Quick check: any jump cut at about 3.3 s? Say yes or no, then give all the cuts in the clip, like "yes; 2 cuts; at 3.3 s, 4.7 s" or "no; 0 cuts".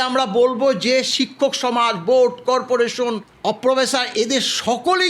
yes; 1 cut; at 3.3 s